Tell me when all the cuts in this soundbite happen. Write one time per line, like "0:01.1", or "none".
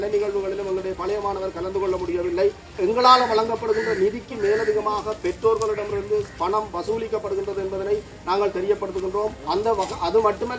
0:02.7